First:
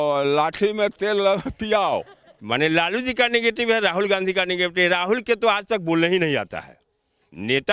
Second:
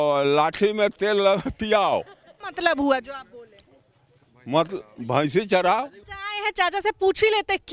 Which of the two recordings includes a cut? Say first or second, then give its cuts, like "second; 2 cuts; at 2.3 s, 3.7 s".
first; 1 cut; at 2.3 s